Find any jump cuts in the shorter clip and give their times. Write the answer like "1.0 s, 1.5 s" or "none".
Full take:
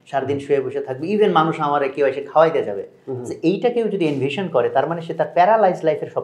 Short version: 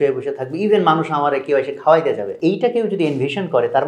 2.3 s